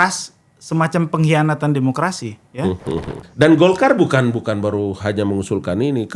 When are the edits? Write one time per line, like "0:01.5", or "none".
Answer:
0:03.1